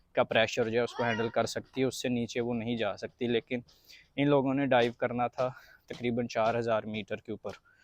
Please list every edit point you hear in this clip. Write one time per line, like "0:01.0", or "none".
none